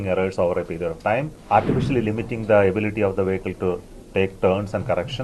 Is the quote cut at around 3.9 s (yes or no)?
no